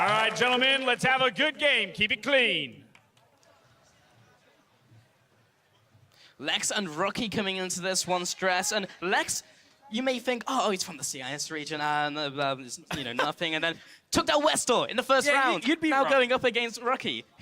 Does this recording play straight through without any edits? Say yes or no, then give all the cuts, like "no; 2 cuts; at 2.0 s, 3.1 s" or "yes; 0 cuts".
no; 2 cuts; at 2.1 s, 16.2 s